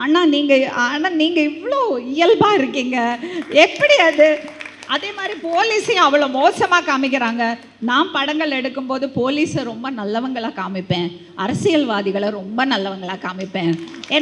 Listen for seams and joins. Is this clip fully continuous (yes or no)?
yes